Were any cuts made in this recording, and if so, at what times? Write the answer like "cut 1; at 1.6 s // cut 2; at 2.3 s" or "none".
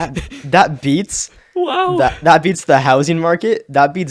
none

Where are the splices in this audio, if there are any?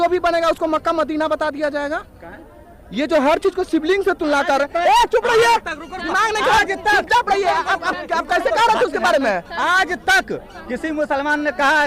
none

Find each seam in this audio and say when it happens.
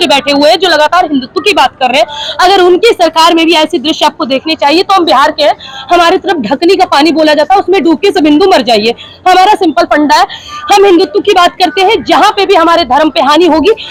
none

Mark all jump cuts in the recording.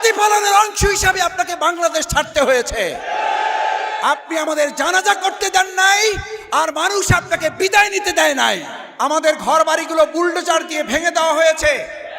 cut 1; at 8.8 s

